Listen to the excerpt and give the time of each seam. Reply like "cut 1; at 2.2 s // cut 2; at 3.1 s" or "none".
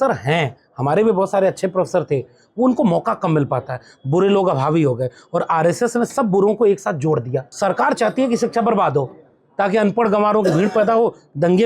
cut 1; at 7.4 s